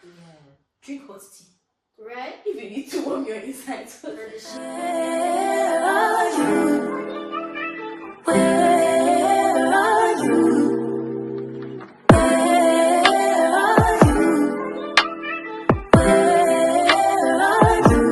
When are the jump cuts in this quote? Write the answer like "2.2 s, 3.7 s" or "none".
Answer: 4.5 s